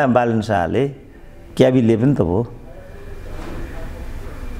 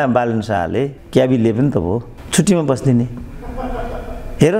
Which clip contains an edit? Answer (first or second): second